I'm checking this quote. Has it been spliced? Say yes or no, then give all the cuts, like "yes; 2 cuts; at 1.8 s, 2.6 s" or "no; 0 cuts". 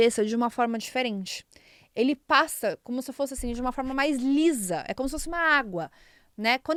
no; 0 cuts